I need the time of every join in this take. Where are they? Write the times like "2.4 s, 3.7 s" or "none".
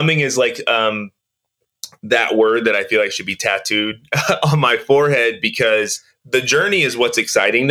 6.3 s